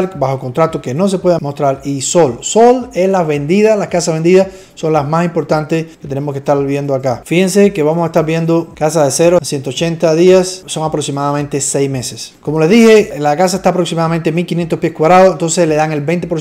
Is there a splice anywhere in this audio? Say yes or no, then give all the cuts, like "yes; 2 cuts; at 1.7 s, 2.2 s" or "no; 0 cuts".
no; 0 cuts